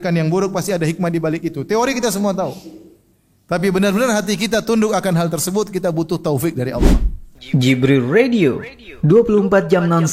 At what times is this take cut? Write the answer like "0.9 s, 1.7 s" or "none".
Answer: 6.8 s